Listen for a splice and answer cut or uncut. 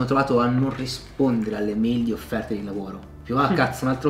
uncut